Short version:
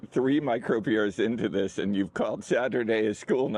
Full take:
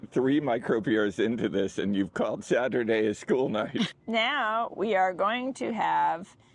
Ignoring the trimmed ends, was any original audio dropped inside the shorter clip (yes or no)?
no